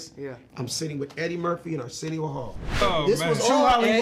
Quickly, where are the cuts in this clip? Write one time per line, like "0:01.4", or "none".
0:02.8